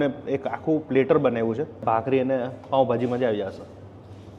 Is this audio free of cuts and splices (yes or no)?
no